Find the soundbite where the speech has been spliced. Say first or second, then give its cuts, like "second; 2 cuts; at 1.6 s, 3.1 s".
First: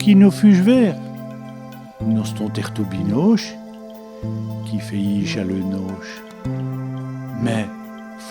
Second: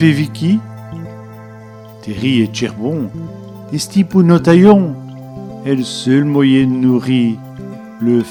first; 2 cuts; at 3.4 s, 4.7 s